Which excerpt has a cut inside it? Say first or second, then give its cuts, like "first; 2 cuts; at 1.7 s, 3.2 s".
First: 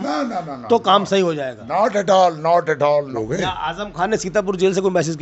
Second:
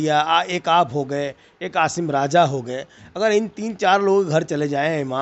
first; 1 cut; at 3.1 s